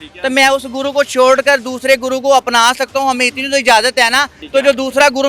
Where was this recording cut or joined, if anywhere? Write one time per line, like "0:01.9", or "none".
0:04.4